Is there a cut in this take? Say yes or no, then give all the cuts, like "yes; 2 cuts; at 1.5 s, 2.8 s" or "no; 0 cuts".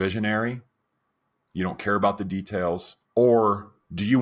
yes; 1 cut; at 2.9 s